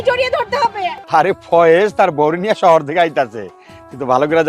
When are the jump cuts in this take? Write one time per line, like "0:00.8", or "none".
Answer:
0:00.9